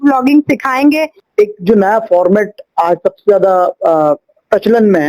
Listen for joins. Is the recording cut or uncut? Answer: cut